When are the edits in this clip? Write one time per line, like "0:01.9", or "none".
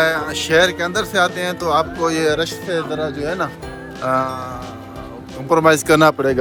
none